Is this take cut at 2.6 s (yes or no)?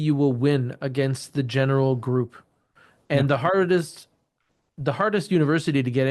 no